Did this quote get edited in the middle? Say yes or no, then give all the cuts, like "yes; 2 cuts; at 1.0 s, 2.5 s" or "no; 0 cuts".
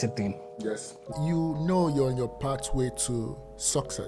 yes; 1 cut; at 1.1 s